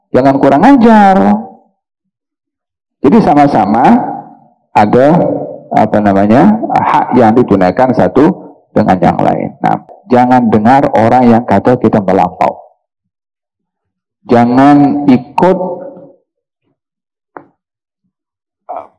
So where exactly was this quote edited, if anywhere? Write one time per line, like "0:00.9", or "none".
0:09.9